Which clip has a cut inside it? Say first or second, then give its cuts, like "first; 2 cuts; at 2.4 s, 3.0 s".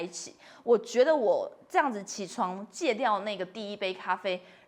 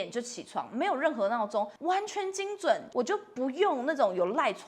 second; 2 cuts; at 1.8 s, 2.8 s